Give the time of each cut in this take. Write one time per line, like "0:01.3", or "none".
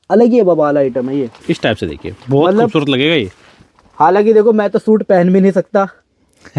none